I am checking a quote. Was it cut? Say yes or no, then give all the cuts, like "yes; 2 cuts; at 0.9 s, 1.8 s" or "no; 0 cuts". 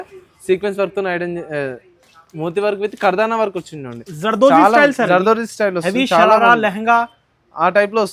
no; 0 cuts